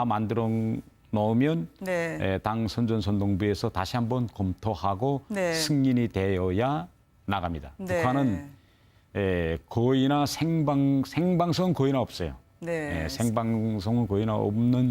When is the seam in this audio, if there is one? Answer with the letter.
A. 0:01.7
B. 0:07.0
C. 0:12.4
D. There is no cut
C